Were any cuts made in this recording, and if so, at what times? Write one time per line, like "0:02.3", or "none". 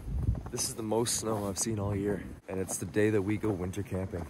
0:02.3